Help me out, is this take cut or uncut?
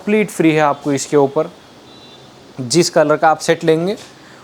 uncut